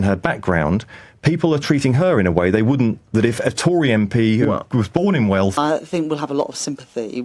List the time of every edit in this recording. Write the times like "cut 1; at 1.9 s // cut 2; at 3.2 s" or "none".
cut 1; at 5.5 s